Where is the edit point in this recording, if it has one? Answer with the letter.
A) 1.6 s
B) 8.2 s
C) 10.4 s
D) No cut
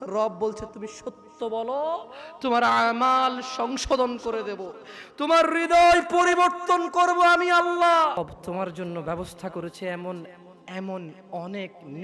B